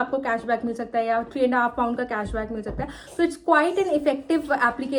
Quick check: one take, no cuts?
yes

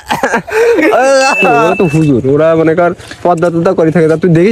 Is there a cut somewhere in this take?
yes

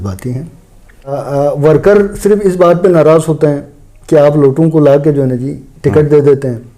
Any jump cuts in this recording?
yes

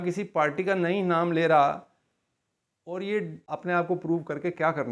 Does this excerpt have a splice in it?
yes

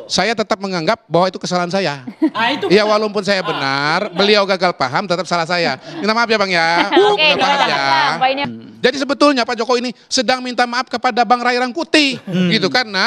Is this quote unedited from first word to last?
no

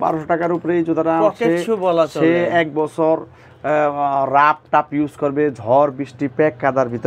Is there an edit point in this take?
no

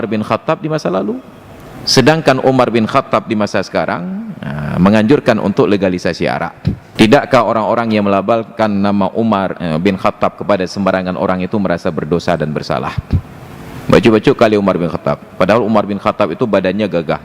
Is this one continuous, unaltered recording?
no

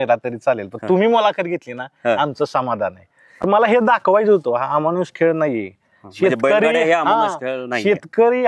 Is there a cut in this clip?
yes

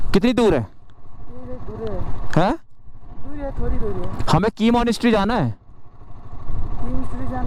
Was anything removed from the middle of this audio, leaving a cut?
no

